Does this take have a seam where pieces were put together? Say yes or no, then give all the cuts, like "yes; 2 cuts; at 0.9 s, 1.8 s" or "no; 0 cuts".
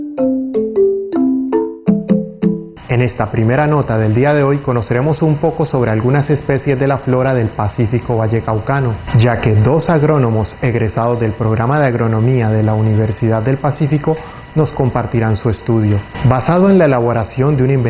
yes; 1 cut; at 16.9 s